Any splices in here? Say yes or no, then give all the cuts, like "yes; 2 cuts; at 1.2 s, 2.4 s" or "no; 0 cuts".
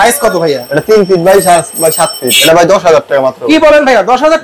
yes; 1 cut; at 2.4 s